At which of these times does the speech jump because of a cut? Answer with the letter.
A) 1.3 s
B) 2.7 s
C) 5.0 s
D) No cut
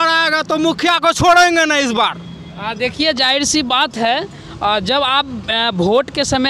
D